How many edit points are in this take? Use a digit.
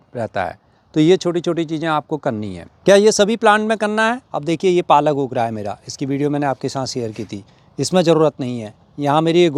0